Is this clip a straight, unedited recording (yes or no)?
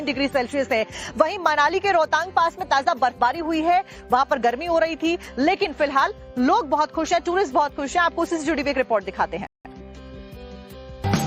yes